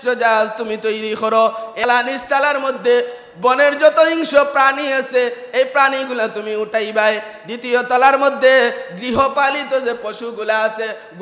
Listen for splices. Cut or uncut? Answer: cut